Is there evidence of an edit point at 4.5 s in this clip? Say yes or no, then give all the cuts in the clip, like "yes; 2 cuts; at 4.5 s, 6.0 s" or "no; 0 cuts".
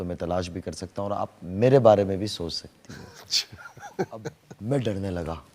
yes; 1 cut; at 4.5 s